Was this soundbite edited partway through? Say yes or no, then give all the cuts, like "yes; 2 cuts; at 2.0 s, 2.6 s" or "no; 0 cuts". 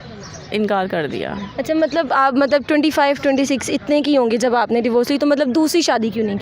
no; 0 cuts